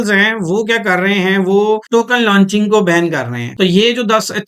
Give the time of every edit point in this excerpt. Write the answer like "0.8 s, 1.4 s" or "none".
1.8 s, 3.4 s